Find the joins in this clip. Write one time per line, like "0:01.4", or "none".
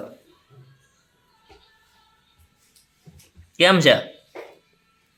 none